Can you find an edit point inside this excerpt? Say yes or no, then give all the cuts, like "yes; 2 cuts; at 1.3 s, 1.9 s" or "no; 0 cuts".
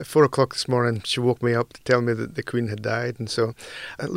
no; 0 cuts